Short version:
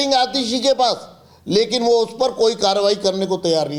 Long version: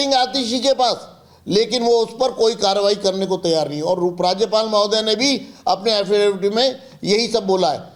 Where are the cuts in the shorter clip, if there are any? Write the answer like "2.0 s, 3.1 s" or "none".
none